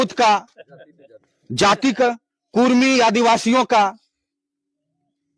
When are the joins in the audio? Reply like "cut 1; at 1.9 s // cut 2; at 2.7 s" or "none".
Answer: none